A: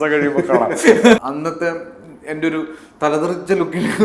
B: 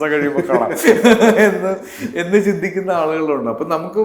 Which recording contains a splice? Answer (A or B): A